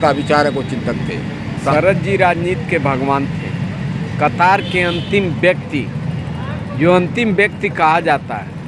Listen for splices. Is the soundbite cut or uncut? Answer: cut